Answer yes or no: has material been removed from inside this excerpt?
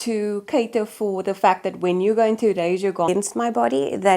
yes